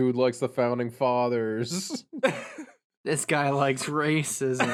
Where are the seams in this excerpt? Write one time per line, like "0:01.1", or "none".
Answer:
none